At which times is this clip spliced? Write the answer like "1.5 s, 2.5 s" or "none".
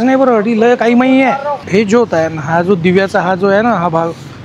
1.6 s